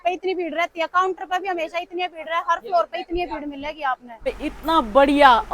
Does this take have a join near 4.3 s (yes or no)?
yes